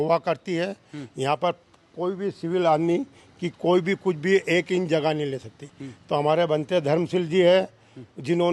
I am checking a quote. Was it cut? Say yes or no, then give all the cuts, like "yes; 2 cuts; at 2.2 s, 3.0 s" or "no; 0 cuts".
no; 0 cuts